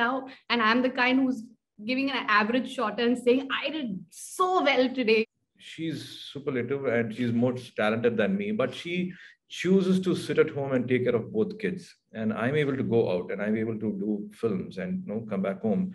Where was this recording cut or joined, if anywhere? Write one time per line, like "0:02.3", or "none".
0:05.2